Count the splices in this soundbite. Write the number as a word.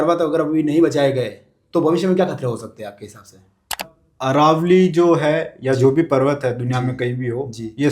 one